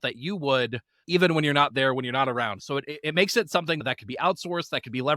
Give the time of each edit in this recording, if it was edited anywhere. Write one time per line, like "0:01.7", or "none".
none